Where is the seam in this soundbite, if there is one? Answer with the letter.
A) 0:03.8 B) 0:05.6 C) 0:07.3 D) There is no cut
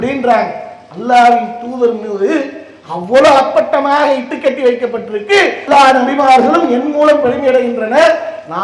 B